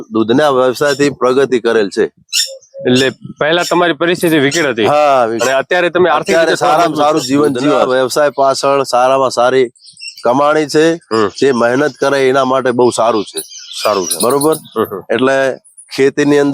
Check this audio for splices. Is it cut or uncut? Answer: cut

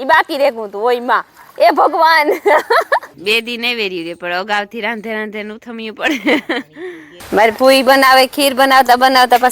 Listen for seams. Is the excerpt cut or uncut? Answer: cut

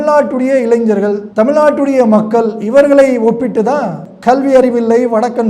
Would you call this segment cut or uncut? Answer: cut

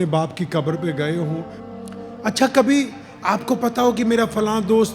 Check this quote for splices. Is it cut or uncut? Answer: cut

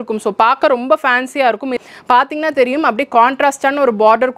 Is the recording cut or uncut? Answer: cut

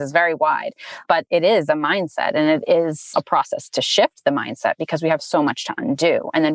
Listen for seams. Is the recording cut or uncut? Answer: cut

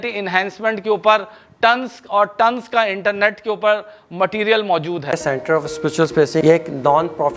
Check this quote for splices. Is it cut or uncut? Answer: cut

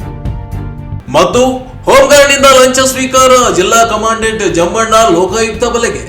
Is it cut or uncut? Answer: cut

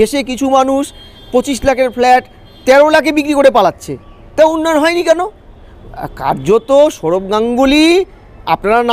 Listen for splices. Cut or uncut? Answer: uncut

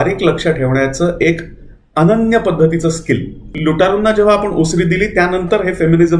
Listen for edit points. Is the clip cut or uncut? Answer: cut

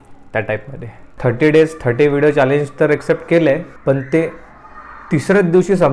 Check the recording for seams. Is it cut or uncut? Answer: cut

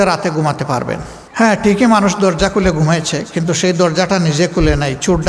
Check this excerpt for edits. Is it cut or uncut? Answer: cut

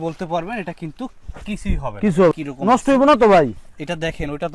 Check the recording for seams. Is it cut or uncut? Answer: cut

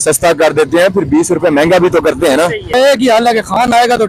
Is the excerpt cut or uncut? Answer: cut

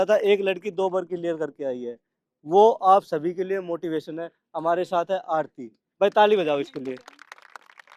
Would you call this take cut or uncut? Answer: uncut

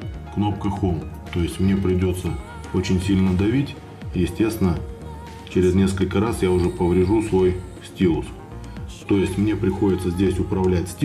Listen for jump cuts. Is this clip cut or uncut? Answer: cut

